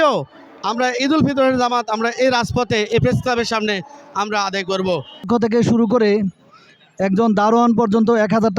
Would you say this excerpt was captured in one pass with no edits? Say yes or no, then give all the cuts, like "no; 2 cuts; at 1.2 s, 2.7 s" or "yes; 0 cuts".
no; 1 cut; at 5.2 s